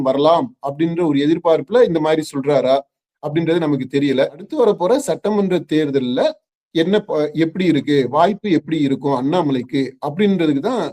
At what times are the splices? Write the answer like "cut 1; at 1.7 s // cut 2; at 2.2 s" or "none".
cut 1; at 4.4 s